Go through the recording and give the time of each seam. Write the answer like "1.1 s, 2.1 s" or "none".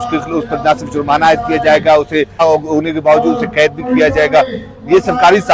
2.4 s